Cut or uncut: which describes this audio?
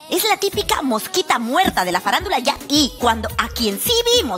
cut